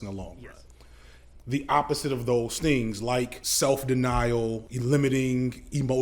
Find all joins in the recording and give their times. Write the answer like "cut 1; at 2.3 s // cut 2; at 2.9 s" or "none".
cut 1; at 1.0 s // cut 2; at 3.4 s // cut 3; at 4.6 s